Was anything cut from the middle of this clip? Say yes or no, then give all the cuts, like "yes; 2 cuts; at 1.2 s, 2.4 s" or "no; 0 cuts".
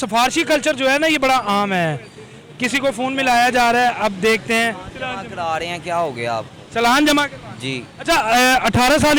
no; 0 cuts